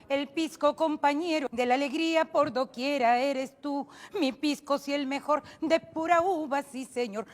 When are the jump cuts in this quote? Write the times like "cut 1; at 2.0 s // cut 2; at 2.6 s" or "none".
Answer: cut 1; at 1.5 s

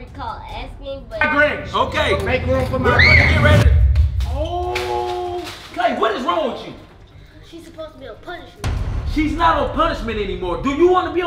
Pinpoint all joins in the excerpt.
cut 1; at 1.2 s

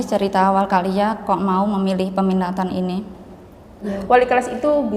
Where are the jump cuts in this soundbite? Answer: cut 1; at 3.9 s

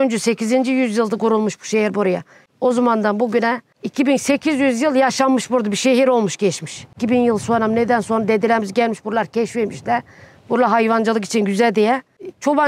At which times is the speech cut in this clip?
none

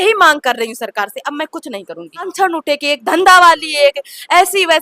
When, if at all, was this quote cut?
cut 1; at 2.3 s

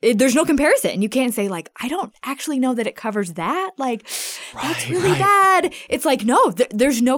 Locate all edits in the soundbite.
none

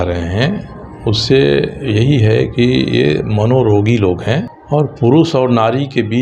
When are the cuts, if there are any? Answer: cut 1; at 4.5 s

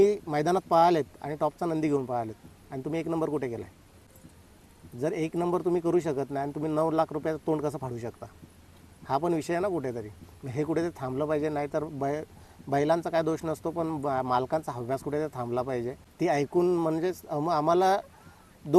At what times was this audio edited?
cut 1; at 16.0 s

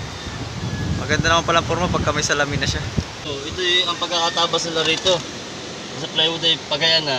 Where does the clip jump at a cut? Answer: cut 1; at 3.3 s

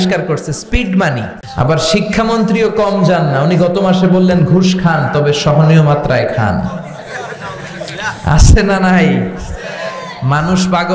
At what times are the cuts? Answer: cut 1; at 1.4 s

